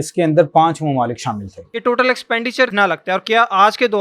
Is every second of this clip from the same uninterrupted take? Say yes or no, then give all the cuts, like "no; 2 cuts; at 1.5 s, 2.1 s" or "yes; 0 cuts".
no; 2 cuts; at 1.6 s, 2.7 s